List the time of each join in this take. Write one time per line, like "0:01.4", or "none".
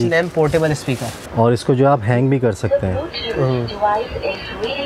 0:01.2